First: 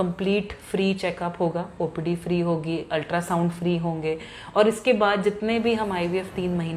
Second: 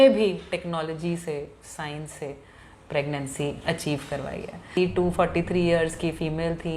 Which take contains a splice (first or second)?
second